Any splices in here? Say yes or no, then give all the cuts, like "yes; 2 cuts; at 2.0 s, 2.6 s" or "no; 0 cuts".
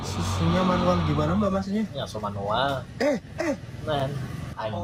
no; 0 cuts